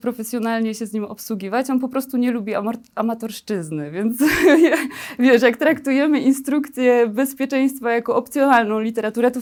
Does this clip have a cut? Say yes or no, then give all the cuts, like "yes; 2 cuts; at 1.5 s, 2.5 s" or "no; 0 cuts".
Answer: no; 0 cuts